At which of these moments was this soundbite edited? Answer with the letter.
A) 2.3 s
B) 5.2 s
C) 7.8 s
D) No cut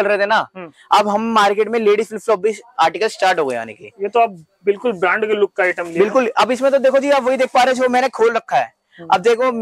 D